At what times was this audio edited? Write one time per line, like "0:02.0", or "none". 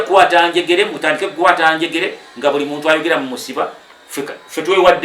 none